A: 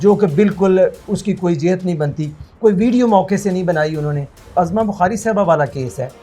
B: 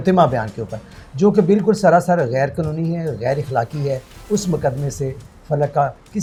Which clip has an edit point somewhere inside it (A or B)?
A